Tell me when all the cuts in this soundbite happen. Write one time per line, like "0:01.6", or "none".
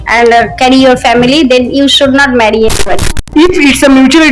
0:03.2